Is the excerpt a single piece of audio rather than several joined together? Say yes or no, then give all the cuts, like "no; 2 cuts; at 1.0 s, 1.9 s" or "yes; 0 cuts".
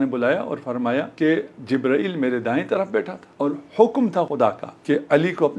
no; 3 cuts; at 1.1 s, 3.2 s, 4.3 s